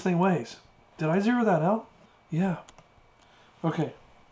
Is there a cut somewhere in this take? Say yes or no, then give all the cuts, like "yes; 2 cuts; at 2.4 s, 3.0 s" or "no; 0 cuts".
no; 0 cuts